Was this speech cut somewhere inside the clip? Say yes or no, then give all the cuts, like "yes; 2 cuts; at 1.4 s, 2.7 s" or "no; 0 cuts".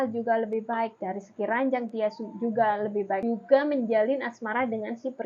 yes; 1 cut; at 3.2 s